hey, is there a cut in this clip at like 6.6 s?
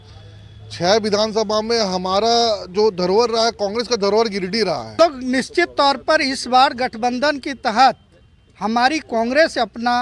no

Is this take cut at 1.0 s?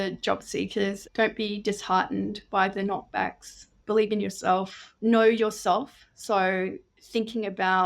yes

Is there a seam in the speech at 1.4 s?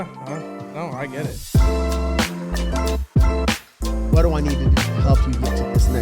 yes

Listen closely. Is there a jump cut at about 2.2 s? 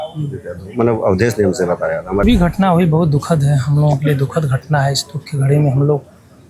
yes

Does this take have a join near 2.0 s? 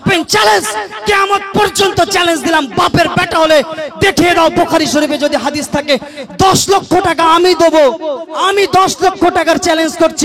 no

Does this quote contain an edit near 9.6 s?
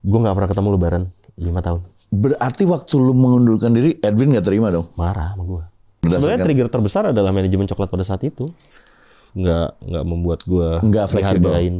no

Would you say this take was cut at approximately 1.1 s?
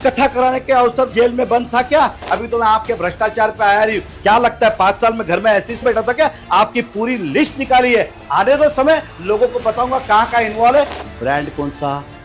yes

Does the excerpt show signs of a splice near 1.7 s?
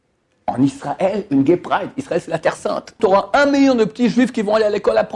no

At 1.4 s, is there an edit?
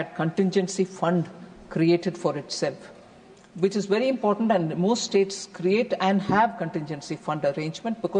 no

